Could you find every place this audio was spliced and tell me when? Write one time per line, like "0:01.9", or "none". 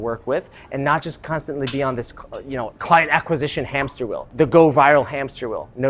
0:04.3